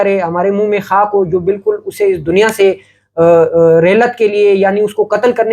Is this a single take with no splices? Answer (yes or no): yes